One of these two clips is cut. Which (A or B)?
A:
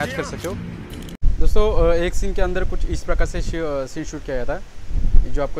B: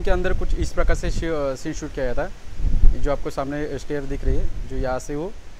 A